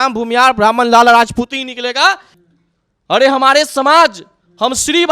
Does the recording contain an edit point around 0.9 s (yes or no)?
no